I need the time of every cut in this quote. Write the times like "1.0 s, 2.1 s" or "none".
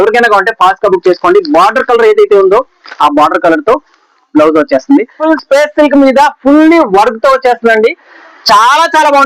5.2 s

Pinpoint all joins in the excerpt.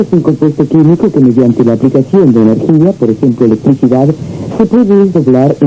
4.4 s

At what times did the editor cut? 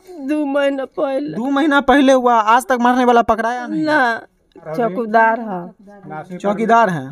4.7 s

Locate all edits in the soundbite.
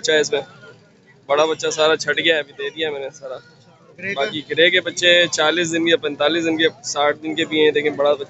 none

